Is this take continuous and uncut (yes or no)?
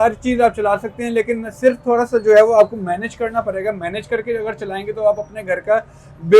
yes